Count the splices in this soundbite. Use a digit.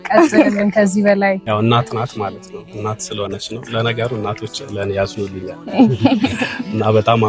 1